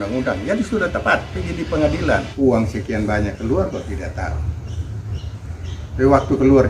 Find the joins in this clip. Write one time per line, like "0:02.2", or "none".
0:02.3